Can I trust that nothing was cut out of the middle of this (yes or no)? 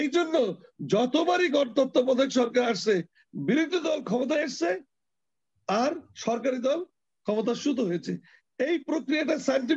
yes